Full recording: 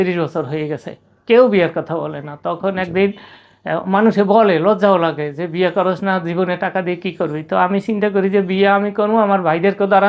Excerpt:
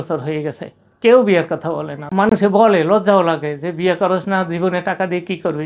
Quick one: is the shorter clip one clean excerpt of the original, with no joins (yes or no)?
no